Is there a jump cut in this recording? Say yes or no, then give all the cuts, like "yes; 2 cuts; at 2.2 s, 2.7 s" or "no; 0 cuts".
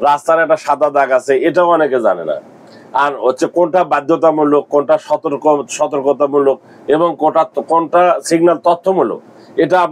no; 0 cuts